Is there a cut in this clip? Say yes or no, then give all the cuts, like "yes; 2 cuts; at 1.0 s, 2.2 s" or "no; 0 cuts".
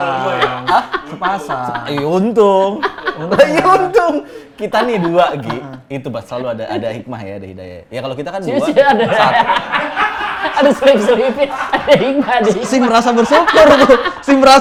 no; 0 cuts